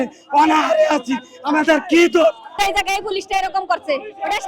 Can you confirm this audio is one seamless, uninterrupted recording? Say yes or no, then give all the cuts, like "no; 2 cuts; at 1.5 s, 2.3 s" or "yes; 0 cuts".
no; 1 cut; at 2.5 s